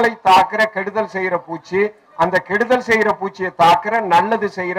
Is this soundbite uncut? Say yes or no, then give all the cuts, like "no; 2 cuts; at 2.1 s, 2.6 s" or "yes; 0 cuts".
yes; 0 cuts